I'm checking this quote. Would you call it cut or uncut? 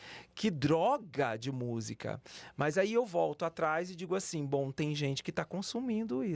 uncut